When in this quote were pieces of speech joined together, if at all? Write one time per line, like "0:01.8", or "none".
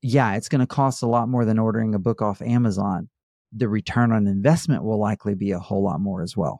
none